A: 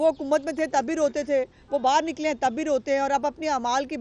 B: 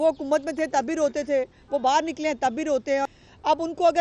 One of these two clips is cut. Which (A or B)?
B